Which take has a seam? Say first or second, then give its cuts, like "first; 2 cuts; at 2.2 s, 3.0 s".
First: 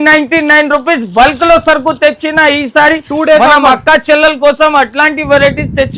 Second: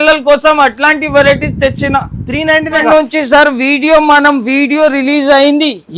second; 1 cut; at 2.8 s